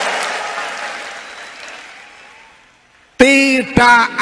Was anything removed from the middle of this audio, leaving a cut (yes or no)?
no